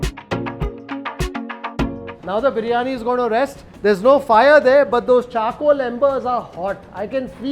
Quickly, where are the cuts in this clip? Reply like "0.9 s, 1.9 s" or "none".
3.6 s